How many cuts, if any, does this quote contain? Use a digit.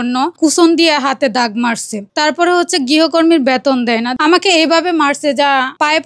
1